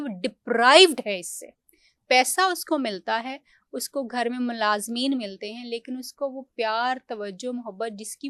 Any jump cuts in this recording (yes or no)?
no